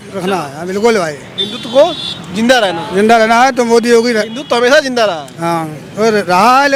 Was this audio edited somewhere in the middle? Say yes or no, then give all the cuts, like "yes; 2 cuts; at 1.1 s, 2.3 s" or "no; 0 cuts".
no; 0 cuts